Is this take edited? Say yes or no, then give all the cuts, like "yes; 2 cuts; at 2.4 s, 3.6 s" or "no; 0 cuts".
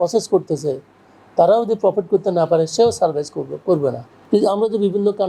yes; 1 cut; at 4.1 s